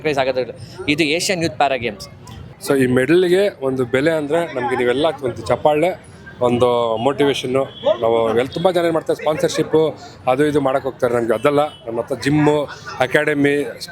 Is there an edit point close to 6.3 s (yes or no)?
no